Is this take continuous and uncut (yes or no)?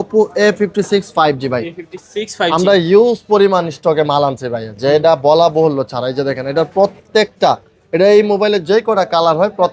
yes